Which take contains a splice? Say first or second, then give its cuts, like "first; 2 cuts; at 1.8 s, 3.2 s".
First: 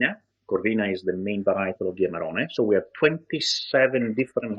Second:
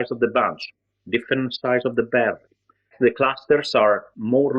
second; 1 cut; at 2.9 s